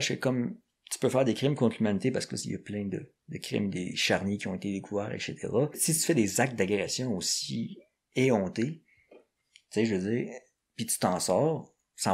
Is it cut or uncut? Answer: cut